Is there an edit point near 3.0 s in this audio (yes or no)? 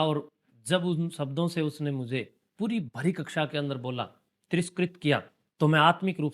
no